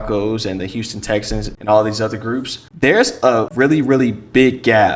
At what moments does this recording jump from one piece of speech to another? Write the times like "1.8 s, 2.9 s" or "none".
1.5 s, 2.6 s, 3.5 s